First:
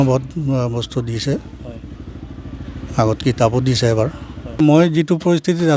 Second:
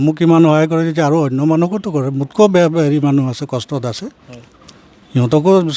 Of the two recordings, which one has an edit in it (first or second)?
first